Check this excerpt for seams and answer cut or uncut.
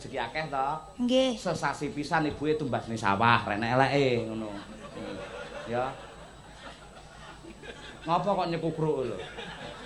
uncut